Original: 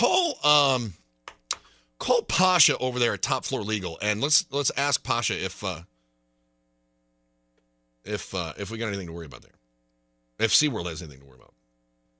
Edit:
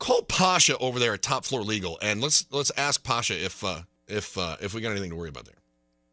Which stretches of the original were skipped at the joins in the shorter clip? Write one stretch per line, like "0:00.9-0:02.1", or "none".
0:05.9-0:07.9

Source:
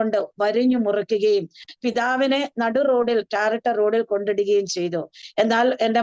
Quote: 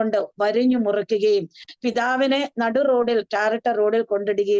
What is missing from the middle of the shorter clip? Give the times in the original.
none

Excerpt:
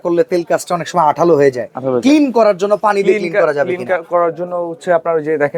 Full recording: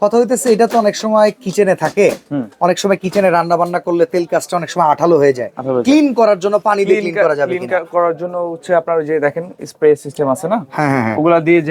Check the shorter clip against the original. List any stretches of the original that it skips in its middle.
none

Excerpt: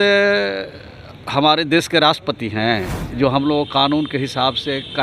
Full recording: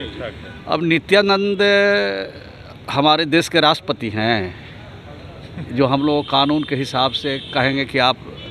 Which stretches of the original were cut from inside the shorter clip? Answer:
0:04.6-0:05.6

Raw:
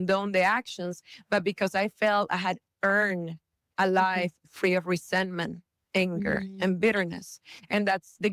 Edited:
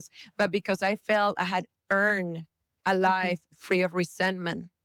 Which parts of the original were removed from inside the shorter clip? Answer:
none

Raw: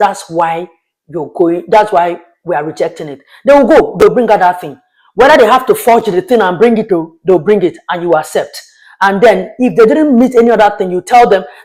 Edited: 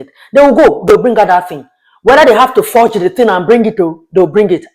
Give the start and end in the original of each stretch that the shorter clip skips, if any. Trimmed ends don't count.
none

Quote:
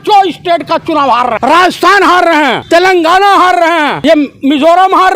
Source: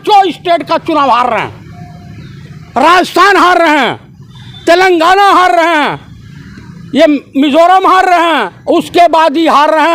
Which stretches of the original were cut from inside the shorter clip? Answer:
0:01.4-0:02.7
0:03.9-0:04.6
0:05.9-0:06.9

